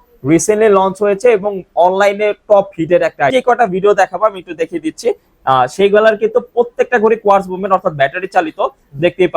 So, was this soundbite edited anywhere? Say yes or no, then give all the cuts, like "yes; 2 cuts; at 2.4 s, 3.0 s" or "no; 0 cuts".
yes; 1 cut; at 3.3 s